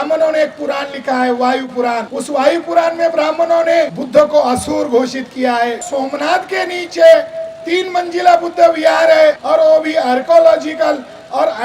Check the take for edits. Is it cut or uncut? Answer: cut